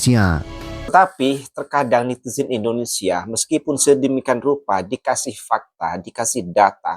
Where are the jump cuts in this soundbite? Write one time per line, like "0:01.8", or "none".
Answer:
0:00.9

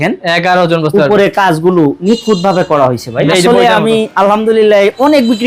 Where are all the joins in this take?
0:03.3

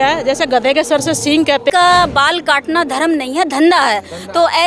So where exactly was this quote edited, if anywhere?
0:01.7

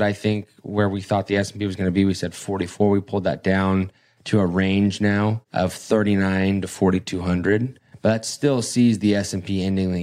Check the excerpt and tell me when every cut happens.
0:05.4

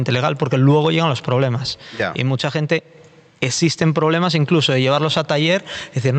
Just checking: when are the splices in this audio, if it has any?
none

